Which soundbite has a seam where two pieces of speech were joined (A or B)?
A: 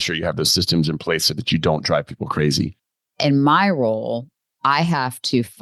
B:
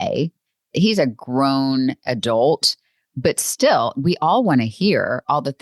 A